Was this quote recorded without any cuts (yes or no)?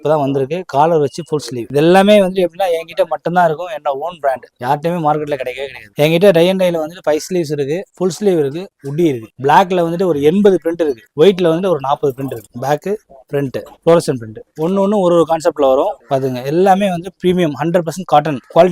no